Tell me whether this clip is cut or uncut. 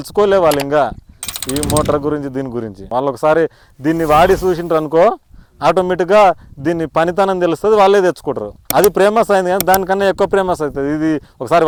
uncut